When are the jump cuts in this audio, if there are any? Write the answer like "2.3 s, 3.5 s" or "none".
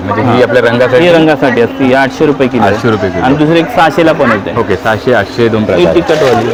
none